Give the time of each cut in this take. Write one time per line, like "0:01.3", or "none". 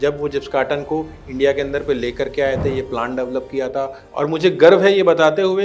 0:04.0